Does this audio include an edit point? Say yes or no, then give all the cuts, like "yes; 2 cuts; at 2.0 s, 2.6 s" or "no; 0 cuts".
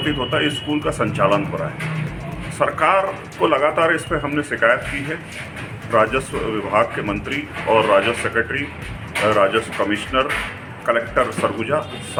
no; 0 cuts